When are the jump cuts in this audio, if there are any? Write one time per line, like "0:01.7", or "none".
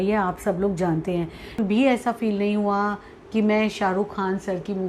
0:01.6